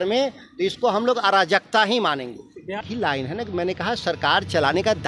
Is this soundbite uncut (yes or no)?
no